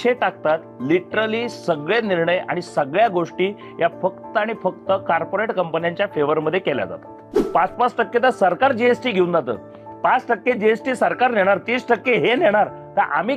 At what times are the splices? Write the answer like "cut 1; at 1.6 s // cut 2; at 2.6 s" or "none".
cut 1; at 7.4 s